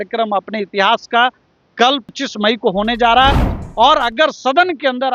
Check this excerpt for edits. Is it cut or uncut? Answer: cut